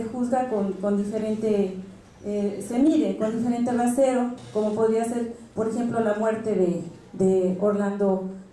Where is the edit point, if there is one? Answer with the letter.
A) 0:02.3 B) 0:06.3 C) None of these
C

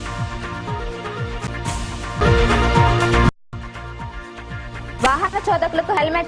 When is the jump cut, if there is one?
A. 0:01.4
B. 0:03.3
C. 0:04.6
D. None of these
A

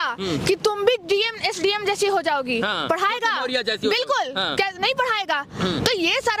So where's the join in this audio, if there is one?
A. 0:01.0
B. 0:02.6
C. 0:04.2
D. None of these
D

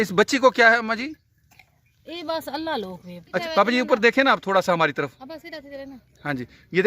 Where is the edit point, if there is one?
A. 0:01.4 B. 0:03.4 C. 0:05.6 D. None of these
B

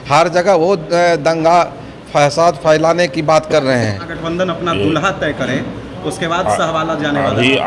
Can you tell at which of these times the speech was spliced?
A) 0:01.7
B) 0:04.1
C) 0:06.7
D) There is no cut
B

